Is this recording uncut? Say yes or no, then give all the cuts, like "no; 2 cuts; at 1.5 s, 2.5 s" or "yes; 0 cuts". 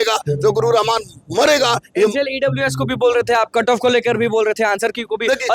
yes; 0 cuts